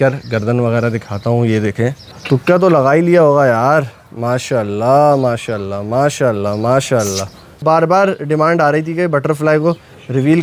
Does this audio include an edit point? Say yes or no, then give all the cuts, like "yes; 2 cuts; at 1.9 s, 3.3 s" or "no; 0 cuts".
yes; 2 cuts; at 2.1 s, 7.6 s